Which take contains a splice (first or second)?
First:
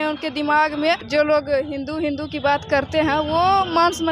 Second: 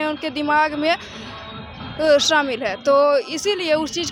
first